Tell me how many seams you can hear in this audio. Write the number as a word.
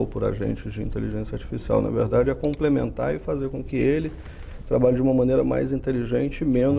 zero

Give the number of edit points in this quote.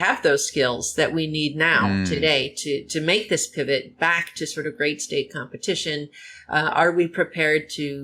zero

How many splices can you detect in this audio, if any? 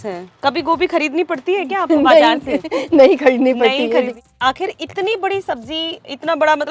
one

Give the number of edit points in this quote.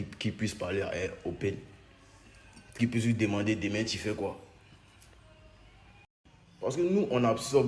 one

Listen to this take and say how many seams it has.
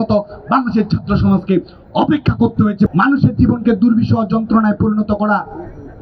one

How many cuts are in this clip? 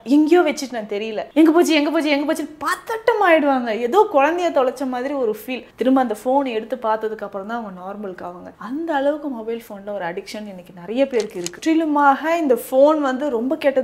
one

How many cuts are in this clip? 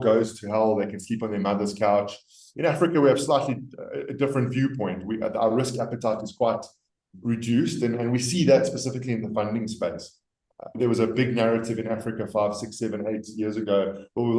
one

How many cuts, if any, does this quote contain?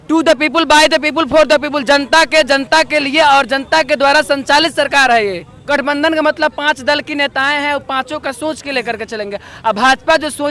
one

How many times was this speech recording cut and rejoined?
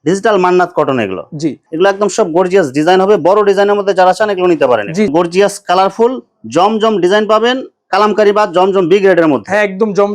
two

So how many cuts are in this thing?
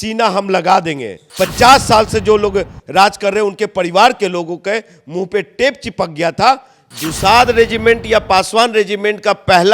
two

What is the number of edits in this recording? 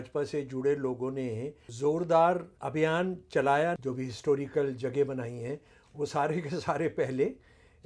three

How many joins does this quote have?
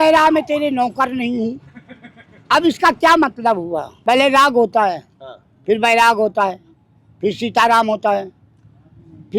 one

